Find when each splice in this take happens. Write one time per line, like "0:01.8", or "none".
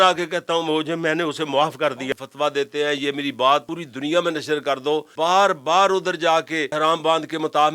0:02.1
0:03.8
0:05.1
0:06.7